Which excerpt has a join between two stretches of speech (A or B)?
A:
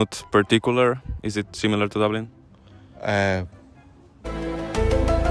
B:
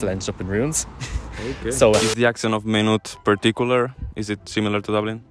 B